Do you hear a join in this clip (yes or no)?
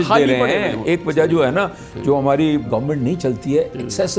yes